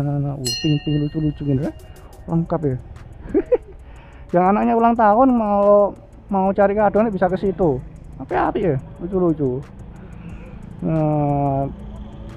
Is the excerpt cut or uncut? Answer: uncut